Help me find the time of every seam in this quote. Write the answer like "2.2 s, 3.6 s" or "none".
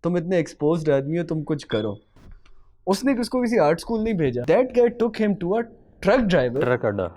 4.4 s